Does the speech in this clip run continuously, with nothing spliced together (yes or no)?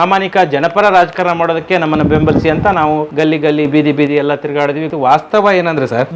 no